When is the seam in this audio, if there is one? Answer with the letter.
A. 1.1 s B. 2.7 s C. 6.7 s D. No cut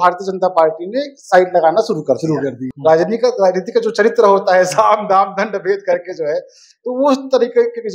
B